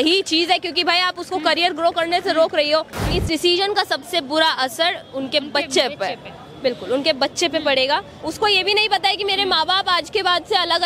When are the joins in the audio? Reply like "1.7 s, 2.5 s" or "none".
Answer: 3.1 s, 8.2 s